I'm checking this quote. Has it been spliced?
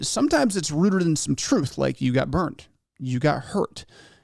no; 0 cuts

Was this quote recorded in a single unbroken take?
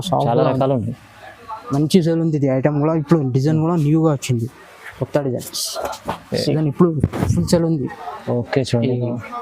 no; 1 cut; at 6.6 s

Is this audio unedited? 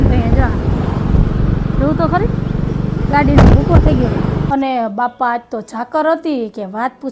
no; 1 cut; at 4.4 s

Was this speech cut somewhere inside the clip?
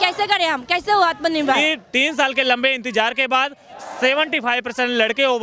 yes; 1 cut; at 1.6 s

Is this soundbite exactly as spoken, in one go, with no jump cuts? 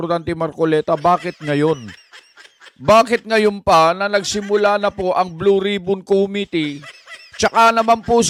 yes; 0 cuts

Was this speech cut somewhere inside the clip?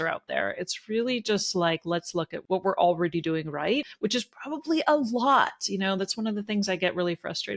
yes; 2 cuts; at 2.4 s, 3.9 s

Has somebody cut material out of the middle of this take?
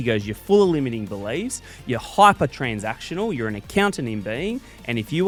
no; 0 cuts

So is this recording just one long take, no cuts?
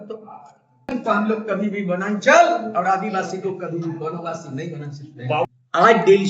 no; 2 cuts; at 0.9 s, 5.2 s

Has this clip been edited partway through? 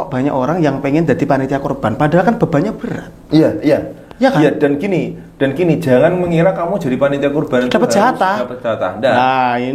no; 0 cuts

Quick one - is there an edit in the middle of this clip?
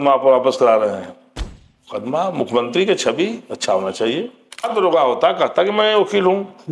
yes; 1 cut; at 4.7 s

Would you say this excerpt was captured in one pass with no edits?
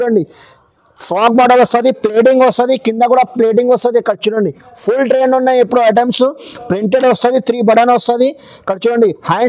yes; 0 cuts

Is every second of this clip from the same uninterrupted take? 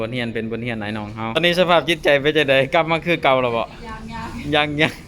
no; 1 cut; at 1.4 s

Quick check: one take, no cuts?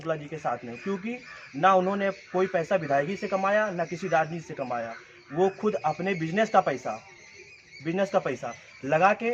yes; 0 cuts

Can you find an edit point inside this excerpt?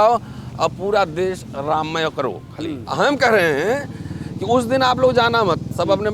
yes; 1 cut; at 2.8 s

